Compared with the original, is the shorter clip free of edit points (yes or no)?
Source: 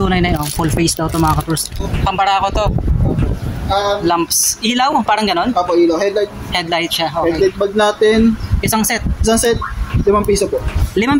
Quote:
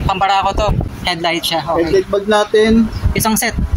no